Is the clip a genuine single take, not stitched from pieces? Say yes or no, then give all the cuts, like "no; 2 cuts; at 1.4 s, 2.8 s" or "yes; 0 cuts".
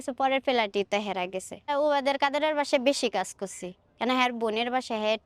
no; 1 cut; at 1.7 s